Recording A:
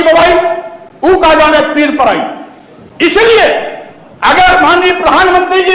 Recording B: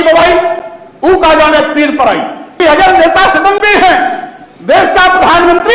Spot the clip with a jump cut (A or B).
B